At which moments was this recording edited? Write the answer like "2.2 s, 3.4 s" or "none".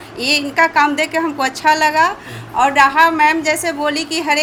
none